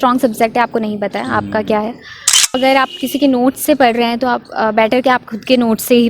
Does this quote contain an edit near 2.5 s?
yes; 1 cut; at 2.5 s

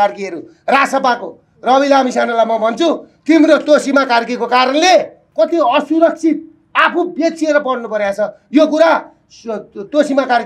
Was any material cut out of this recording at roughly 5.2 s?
yes; 1 cut; at 5.2 s

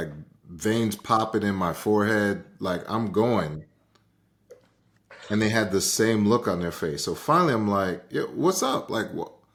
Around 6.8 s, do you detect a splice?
no; 0 cuts

